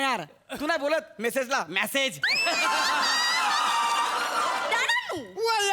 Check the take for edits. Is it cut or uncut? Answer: cut